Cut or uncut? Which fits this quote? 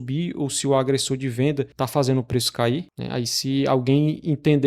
cut